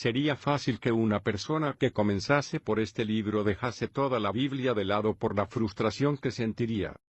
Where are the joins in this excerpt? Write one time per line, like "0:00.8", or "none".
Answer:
0:02.2